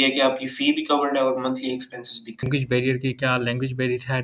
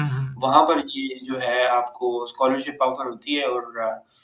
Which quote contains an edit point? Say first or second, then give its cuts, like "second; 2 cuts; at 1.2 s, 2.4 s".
first; 1 cut; at 2.5 s